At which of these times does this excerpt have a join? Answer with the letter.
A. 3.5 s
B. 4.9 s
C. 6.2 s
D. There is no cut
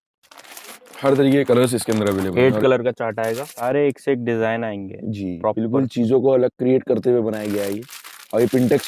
A